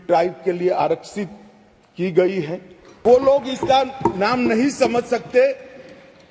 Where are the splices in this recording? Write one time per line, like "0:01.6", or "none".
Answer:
0:03.0